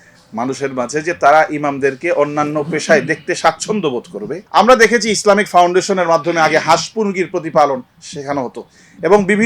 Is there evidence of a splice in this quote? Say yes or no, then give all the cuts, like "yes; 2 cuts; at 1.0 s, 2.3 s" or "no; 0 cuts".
yes; 1 cut; at 4.4 s